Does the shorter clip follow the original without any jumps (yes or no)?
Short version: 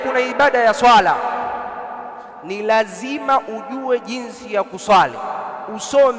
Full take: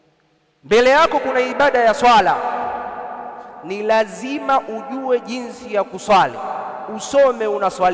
yes